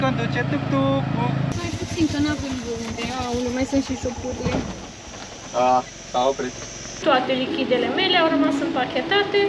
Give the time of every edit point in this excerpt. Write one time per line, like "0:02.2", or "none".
0:01.5
0:07.0